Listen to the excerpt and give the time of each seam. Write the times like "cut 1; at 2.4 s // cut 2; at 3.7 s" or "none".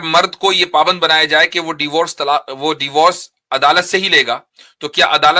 none